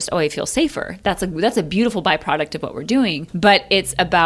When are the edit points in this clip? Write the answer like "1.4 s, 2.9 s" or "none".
3.2 s